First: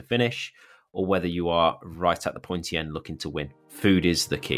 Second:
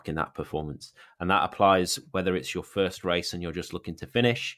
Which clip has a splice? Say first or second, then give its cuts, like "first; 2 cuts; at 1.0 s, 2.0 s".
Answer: first; 1 cut; at 3.6 s